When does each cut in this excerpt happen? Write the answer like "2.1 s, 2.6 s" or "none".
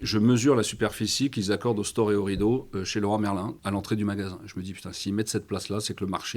3.6 s